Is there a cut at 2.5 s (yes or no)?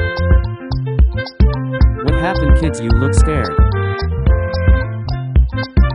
no